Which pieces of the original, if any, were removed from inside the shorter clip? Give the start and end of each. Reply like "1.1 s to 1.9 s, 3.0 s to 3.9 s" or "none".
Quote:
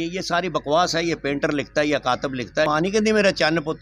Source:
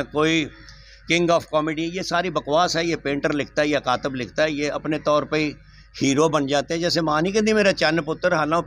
4.5 s to 7.1 s